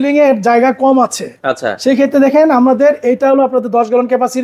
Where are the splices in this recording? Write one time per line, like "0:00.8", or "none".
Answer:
none